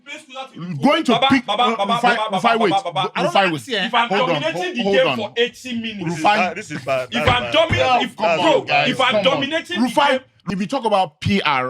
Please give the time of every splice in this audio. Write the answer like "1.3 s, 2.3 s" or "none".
10.3 s